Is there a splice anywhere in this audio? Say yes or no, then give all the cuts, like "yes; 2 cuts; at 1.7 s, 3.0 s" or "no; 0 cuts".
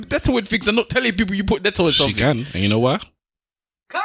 no; 0 cuts